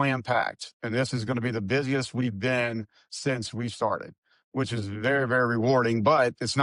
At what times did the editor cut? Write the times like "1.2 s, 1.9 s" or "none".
none